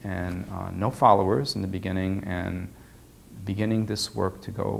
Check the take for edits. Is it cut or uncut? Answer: uncut